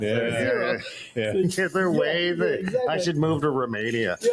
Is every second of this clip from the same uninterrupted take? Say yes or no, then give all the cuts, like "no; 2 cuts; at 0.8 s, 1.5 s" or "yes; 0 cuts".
yes; 0 cuts